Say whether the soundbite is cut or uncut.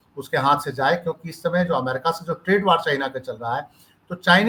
uncut